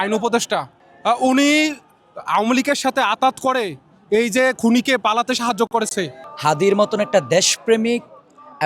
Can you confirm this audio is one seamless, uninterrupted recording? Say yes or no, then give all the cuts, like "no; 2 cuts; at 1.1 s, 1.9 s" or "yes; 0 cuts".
no; 1 cut; at 6.2 s